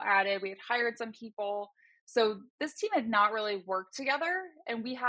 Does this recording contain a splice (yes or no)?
no